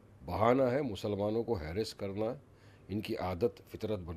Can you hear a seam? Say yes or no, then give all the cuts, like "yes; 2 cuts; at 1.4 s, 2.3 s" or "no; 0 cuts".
no; 0 cuts